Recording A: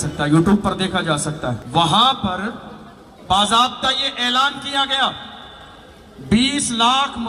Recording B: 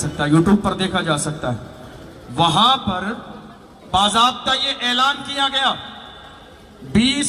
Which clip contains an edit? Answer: A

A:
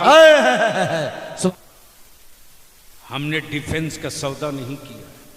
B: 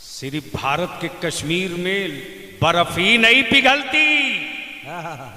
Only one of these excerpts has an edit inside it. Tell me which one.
A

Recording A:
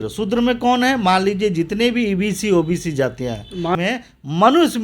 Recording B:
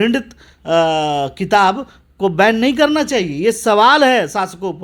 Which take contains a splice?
A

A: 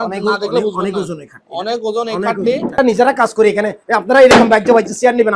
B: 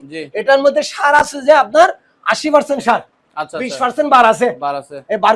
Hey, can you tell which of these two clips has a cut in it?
A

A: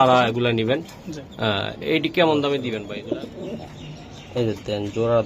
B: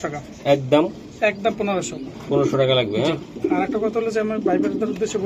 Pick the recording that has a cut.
A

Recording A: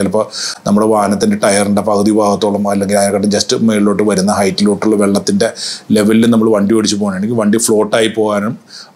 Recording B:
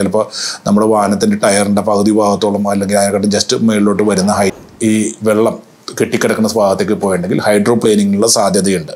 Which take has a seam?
B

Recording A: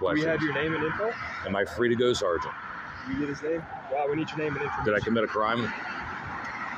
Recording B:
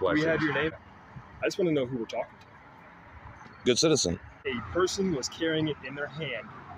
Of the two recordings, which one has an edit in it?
B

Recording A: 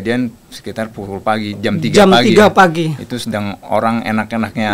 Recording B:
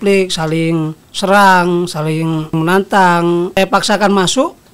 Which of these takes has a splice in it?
B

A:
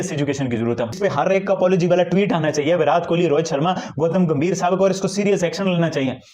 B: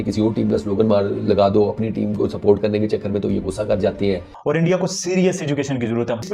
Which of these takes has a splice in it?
B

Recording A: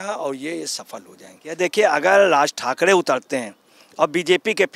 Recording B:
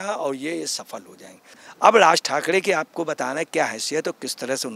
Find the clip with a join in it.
A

